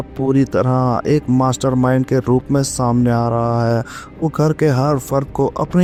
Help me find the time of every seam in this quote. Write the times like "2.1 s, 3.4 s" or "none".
none